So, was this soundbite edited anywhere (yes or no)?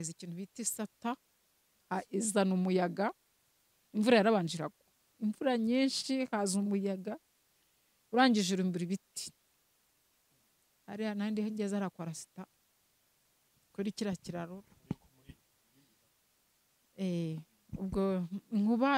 no